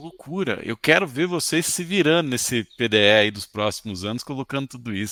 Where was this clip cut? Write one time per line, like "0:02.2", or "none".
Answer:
none